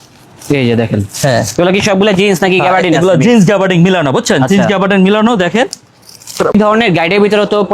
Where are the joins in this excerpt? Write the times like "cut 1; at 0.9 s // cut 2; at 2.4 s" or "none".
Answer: cut 1; at 6.5 s